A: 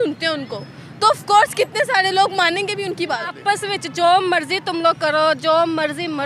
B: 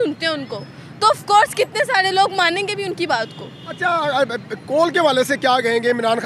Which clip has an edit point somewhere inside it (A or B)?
A